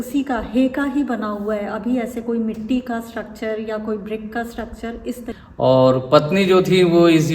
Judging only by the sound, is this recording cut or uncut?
cut